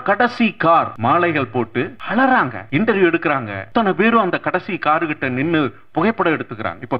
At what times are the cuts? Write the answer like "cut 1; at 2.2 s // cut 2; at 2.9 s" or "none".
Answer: cut 1; at 0.9 s // cut 2; at 2.0 s // cut 3; at 2.6 s // cut 4; at 3.5 s